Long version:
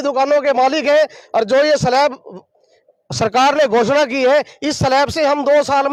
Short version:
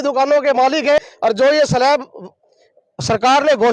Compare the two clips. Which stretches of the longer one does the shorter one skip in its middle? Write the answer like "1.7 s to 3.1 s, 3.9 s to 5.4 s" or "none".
1.0 s to 1.1 s